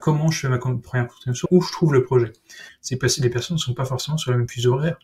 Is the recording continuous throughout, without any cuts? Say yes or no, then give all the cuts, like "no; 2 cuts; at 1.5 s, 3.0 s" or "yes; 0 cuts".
no; 2 cuts; at 1.5 s, 2.7 s